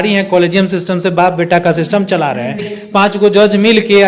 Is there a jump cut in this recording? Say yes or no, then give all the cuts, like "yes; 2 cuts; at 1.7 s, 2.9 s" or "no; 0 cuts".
yes; 1 cut; at 2.7 s